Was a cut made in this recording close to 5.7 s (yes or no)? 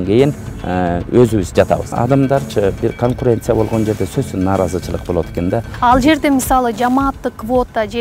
yes